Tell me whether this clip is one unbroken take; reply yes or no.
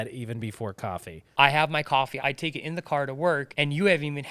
no